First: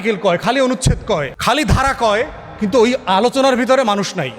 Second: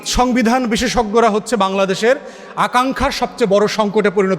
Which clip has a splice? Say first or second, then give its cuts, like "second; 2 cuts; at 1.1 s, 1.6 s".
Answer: first; 1 cut; at 1.3 s